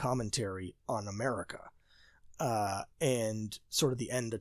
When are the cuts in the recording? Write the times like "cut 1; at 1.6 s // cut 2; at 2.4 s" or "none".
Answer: none